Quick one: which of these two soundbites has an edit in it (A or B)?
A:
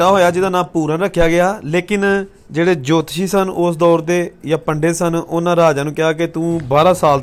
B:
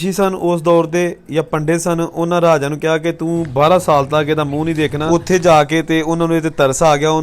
B